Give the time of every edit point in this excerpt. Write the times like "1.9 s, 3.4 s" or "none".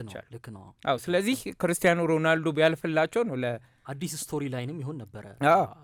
none